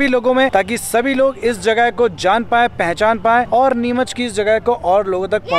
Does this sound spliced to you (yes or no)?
no